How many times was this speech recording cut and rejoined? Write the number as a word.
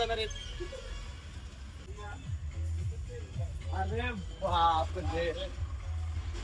one